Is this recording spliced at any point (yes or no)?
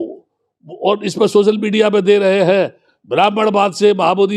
no